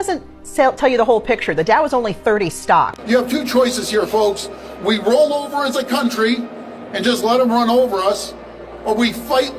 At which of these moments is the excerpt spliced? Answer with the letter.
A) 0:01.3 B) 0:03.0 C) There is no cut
B